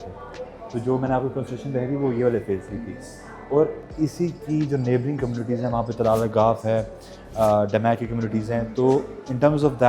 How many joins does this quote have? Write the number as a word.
zero